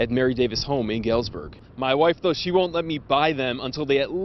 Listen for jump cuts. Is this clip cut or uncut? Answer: cut